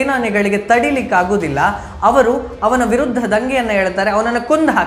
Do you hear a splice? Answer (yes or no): no